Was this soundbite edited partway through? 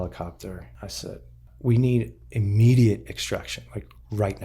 yes; 1 cut; at 1.0 s

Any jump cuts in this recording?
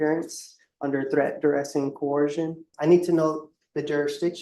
yes; 1 cut; at 2.7 s

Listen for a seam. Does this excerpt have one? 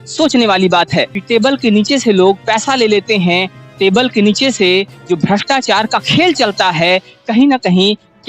yes; 1 cut; at 1.2 s

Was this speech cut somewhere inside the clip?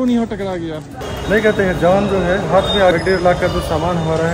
yes; 2 cuts; at 1.1 s, 2.9 s

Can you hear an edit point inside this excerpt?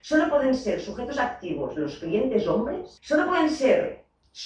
yes; 1 cut; at 2.9 s

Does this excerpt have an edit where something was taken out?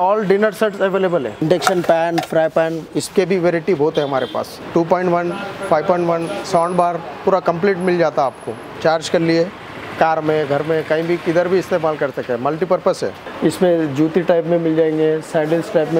yes; 4 cuts; at 1.4 s, 4.5 s, 8.7 s, 13.2 s

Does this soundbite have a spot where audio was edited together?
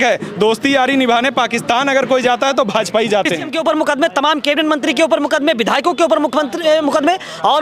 yes; 1 cut; at 3.5 s

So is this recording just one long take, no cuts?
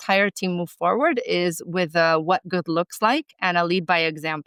yes; 0 cuts

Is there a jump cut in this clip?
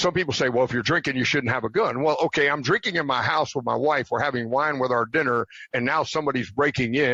no; 0 cuts

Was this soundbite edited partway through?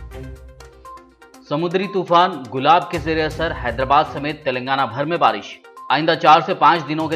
yes; 1 cut; at 1.0 s

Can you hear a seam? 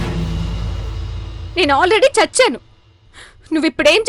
no; 0 cuts

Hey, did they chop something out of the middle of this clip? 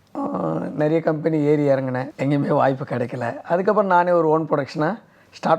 yes; 1 cut; at 2.1 s

